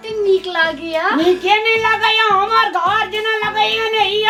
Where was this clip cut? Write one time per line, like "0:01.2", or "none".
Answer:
none